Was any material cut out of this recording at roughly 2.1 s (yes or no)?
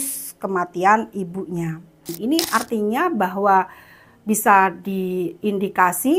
yes